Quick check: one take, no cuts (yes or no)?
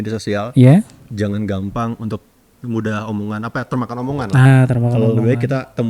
yes